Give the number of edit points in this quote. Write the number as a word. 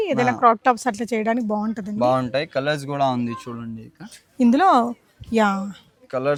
zero